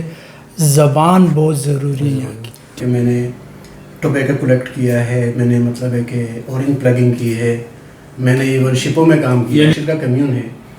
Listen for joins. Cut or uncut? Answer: cut